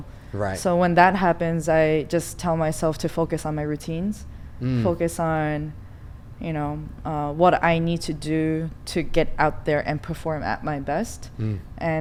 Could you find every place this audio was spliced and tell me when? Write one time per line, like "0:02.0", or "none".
none